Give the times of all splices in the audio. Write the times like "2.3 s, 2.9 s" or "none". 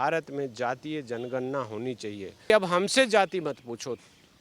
2.5 s